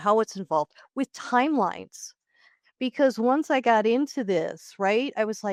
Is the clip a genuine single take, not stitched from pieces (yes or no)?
yes